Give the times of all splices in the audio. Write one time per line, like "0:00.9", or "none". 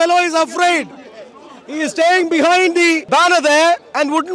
0:03.0